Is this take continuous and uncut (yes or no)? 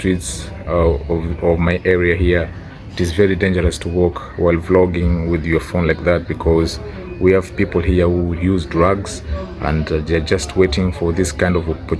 yes